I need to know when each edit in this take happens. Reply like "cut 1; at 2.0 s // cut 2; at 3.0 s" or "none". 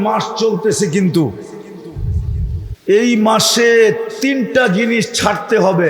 cut 1; at 2.7 s